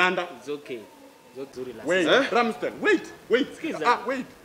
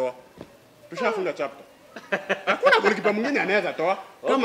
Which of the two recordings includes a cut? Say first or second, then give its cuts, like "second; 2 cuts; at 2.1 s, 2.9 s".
first; 1 cut; at 1.5 s